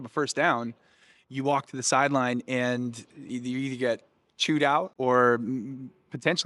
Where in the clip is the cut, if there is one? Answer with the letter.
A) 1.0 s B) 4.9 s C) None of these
B